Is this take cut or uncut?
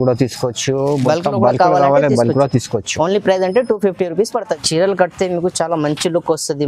cut